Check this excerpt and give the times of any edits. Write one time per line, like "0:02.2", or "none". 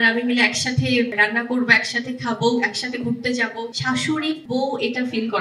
0:01.1
0:04.1